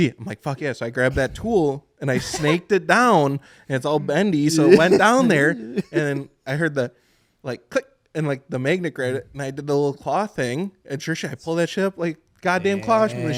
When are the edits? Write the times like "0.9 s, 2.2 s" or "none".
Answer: none